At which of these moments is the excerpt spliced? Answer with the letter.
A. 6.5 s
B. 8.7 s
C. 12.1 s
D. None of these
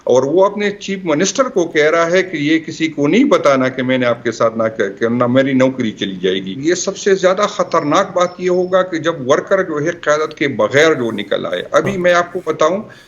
A